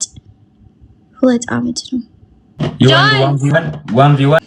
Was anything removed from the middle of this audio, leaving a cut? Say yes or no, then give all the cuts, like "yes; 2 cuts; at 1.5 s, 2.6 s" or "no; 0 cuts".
yes; 1 cut; at 2.6 s